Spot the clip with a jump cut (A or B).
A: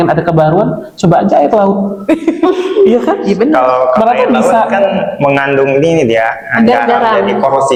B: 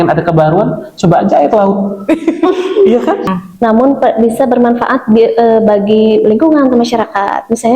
B